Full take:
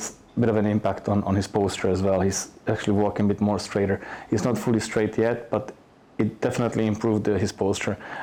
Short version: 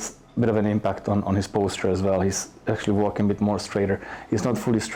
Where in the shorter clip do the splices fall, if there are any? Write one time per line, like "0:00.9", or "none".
none